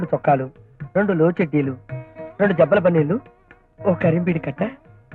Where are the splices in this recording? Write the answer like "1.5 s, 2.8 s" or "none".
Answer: none